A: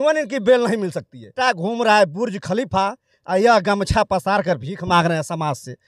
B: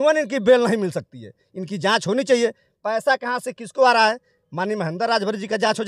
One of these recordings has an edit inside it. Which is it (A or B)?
A